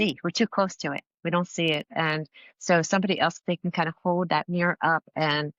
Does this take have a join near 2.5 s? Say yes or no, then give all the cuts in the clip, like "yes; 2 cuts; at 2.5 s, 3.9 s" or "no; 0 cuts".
no; 0 cuts